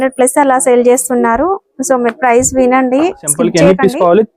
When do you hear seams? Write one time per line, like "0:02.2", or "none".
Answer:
0:03.4